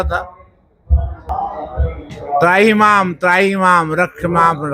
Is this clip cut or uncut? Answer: cut